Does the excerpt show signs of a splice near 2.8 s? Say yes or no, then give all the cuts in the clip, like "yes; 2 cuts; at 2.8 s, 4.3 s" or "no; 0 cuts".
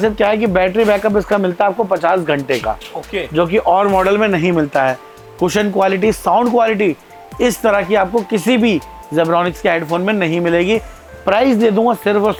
no; 0 cuts